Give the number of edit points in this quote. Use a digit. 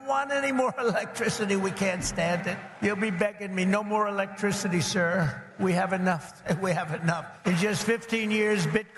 3